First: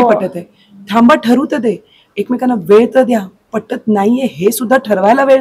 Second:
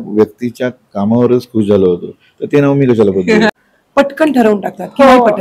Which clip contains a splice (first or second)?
second